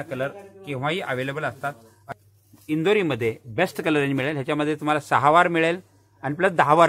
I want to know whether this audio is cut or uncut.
cut